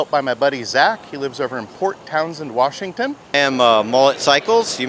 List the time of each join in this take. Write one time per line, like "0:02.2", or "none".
0:03.3